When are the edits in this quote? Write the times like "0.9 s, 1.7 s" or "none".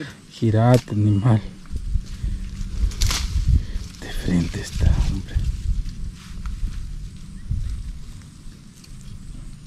none